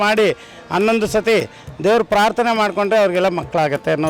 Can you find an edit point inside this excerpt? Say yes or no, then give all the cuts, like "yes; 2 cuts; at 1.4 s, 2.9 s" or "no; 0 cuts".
no; 0 cuts